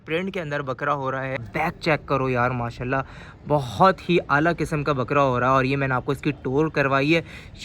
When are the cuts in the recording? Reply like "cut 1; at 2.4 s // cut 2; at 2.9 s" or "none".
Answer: cut 1; at 1.5 s